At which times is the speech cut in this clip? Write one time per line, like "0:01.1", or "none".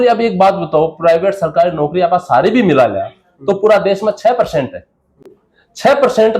none

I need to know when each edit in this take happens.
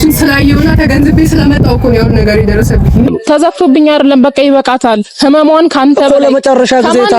0:03.1

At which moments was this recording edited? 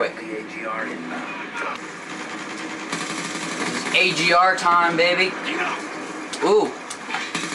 0:01.8

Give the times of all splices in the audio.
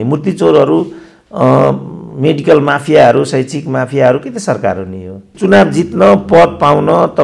0:05.3

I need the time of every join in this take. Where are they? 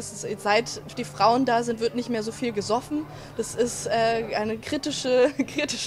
none

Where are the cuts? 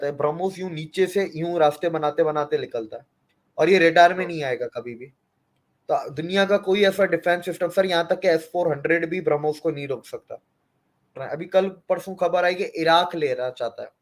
0:11.2

